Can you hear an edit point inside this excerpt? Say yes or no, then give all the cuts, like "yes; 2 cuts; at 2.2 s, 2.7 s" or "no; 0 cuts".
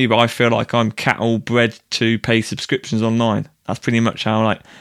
no; 0 cuts